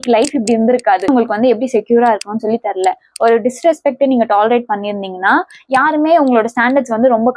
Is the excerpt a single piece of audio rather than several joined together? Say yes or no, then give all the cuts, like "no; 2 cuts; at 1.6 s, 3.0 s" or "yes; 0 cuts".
no; 1 cut; at 1.1 s